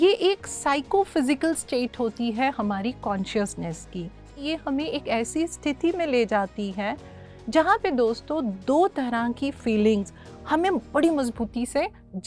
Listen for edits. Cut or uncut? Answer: cut